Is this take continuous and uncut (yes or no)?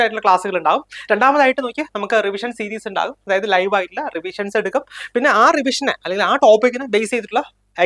yes